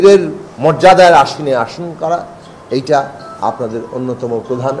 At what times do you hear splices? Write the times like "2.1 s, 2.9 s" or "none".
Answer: none